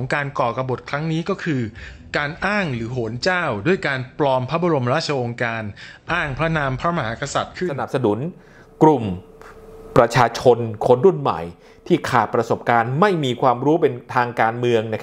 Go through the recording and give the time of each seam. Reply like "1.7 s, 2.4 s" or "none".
7.8 s